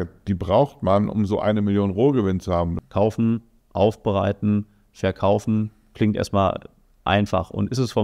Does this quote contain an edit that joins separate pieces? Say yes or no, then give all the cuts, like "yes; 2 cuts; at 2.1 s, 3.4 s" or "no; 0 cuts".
yes; 1 cut; at 2.8 s